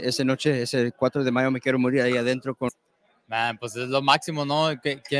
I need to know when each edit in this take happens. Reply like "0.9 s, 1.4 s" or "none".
2.7 s